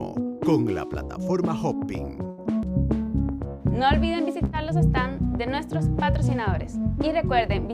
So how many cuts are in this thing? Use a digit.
1